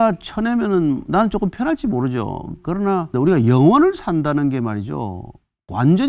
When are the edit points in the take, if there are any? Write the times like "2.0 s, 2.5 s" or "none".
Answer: 3.1 s